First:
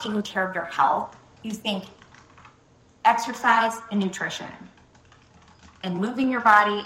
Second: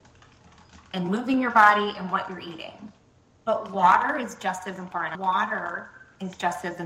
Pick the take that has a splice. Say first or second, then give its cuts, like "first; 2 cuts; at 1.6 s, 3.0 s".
second; 1 cut; at 5.1 s